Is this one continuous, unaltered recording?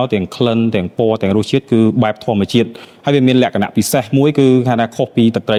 yes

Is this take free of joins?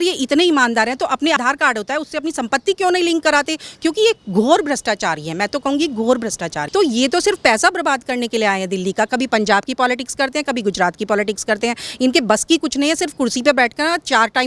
no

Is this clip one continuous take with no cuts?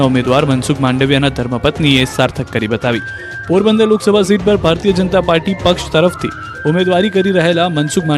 no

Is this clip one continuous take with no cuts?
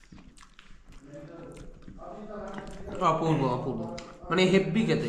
yes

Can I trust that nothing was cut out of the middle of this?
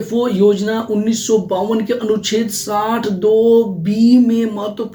yes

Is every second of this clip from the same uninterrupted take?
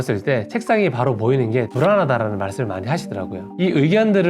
yes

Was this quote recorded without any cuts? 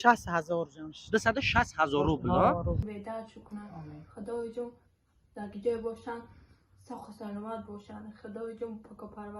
no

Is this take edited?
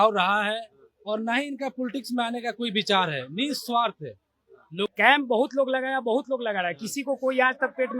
yes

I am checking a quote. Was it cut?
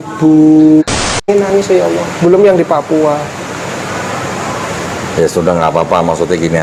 yes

